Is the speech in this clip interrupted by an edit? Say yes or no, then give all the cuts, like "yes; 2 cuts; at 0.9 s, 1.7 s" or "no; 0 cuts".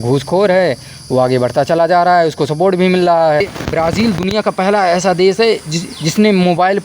yes; 1 cut; at 3.4 s